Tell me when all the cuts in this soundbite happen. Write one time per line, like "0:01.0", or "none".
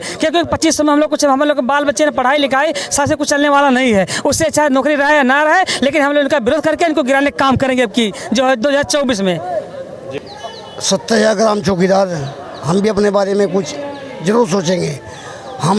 0:10.2